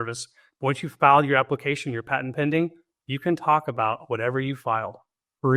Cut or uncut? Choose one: uncut